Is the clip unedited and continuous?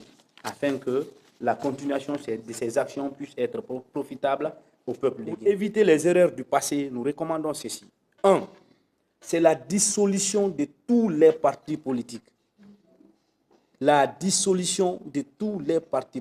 no; 1 cut; at 5.3 s

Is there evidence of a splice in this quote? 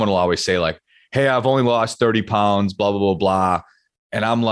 no; 0 cuts

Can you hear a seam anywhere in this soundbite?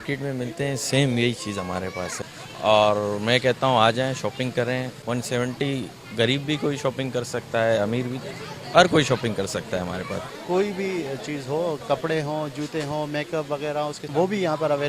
yes; 4 cuts; at 2.1 s, 4.9 s, 10.3 s, 14.1 s

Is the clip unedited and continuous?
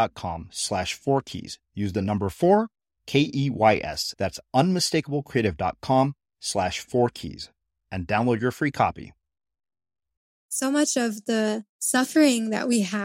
no; 2 cuts; at 10.5 s, 11.7 s

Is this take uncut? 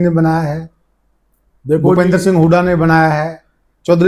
yes; 0 cuts

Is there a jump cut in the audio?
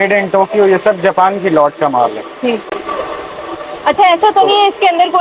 no; 0 cuts

